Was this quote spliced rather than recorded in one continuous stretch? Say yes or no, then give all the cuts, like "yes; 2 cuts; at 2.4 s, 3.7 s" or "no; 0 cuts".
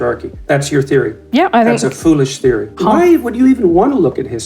no; 0 cuts